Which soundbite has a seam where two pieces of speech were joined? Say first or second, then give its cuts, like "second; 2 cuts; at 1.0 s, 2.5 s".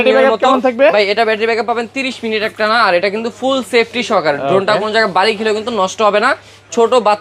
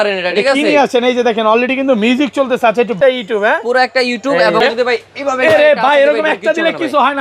second; 2 cuts; at 2.9 s, 4.6 s